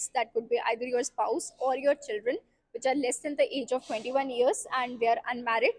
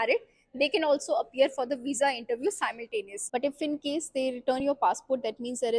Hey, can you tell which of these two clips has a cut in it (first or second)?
second